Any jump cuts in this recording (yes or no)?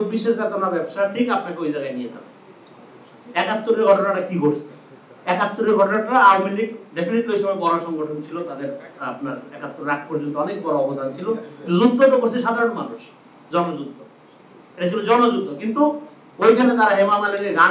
no